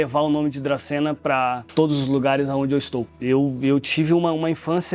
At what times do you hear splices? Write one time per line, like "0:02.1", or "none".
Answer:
0:01.6
0:03.1